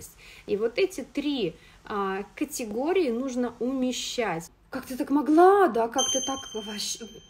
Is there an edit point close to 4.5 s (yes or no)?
yes